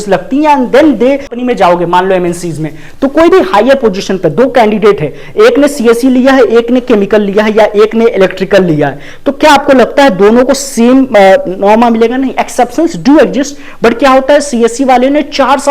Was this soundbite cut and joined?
yes; 1 cut; at 1.4 s

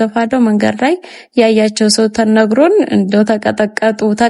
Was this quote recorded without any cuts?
yes; 0 cuts

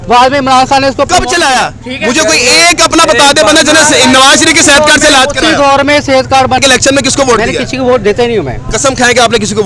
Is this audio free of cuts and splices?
no; 1 cut; at 6.6 s

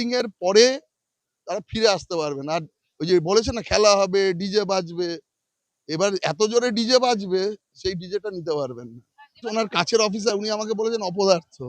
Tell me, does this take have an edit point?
yes; 1 cut; at 9.5 s

